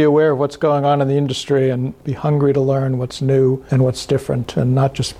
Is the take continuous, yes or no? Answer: no